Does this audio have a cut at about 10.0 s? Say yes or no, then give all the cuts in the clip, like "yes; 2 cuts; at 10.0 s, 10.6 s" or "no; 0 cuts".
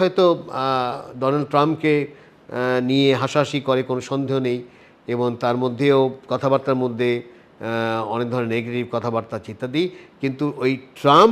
no; 0 cuts